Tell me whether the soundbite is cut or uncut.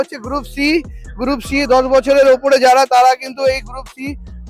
uncut